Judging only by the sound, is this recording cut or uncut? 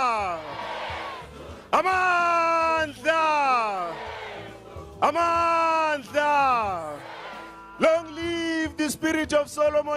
cut